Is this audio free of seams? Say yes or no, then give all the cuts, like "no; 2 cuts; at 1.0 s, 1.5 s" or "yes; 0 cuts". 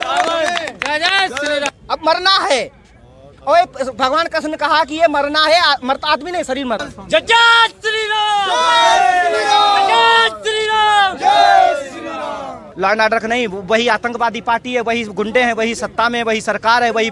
no; 3 cuts; at 1.7 s, 6.9 s, 12.6 s